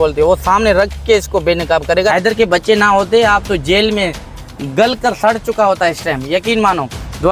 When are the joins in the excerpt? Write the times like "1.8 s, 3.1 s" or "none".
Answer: 2.1 s